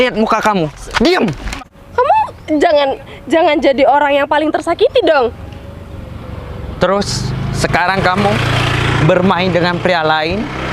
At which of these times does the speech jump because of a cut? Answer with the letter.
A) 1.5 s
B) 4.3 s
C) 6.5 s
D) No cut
A